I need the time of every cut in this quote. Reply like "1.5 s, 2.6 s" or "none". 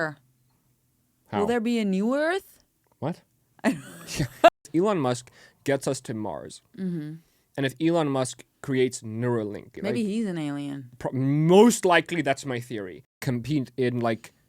4.5 s, 9.7 s, 13.2 s